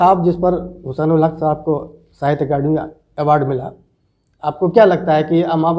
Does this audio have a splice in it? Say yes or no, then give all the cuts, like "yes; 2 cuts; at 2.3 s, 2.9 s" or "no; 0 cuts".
no; 0 cuts